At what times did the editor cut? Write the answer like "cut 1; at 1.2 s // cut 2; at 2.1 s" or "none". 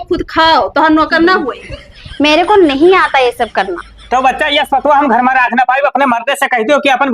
cut 1; at 3.9 s